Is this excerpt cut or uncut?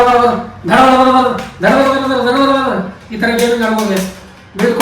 cut